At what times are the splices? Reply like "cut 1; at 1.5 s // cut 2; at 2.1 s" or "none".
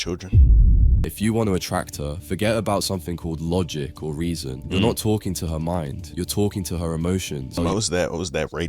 cut 1; at 1.0 s // cut 2; at 7.5 s

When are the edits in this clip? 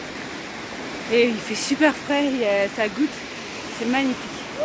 none

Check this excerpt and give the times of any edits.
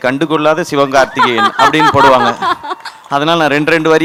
none

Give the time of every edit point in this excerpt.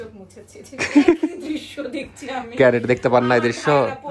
none

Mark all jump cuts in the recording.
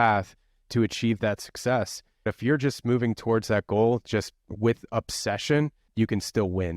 cut 1; at 2.3 s // cut 2; at 5.9 s

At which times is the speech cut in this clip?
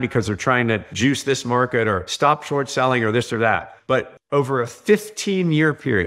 cut 1; at 0.9 s // cut 2; at 2.1 s // cut 3; at 3.9 s

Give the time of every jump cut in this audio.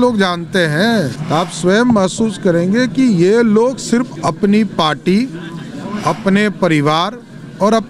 cut 1; at 1.2 s

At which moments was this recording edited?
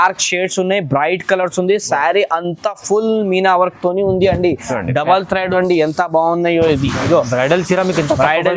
cut 1; at 5.5 s

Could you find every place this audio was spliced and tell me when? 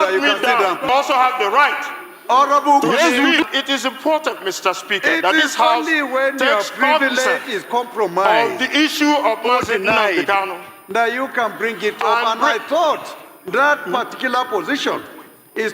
cut 1; at 1.1 s // cut 2; at 3.4 s

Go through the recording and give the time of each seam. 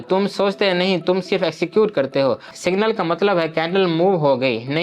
cut 1; at 2.5 s

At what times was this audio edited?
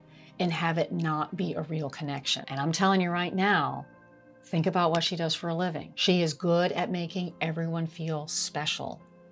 cut 1; at 2.4 s // cut 2; at 5.9 s

